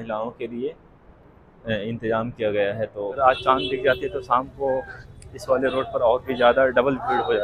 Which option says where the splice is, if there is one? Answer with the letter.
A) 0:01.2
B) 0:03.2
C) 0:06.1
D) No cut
B